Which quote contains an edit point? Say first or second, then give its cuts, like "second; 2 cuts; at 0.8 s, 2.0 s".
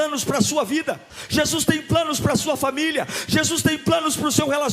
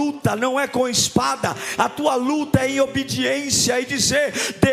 first; 1 cut; at 1.1 s